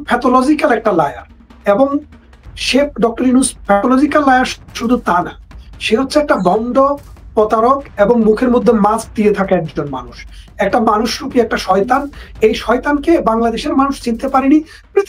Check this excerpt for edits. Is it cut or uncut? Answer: uncut